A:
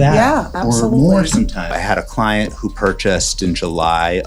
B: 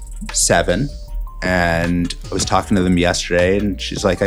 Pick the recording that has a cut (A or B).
A